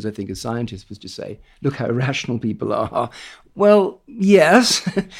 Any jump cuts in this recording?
yes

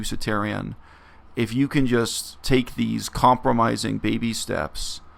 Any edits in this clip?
no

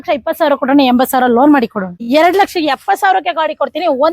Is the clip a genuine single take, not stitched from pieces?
no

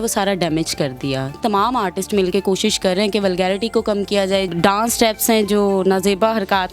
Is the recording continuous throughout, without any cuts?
no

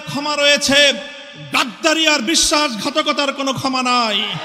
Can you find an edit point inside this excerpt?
no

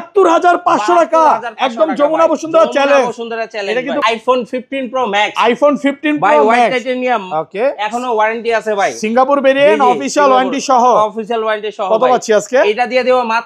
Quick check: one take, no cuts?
no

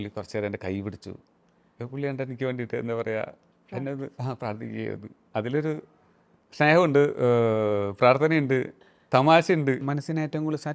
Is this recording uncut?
no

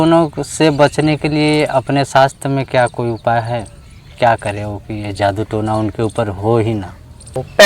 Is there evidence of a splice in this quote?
no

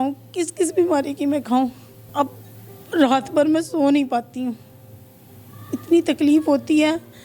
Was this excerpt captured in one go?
no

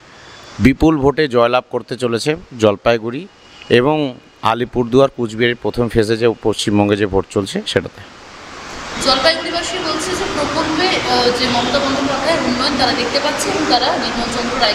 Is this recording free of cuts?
yes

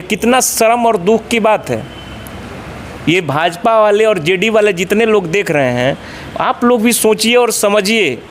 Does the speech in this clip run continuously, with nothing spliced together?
yes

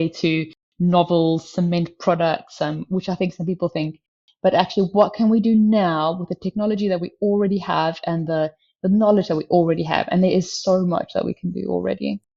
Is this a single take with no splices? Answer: yes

